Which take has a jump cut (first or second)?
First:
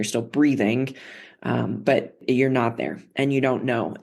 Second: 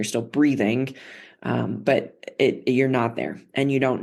first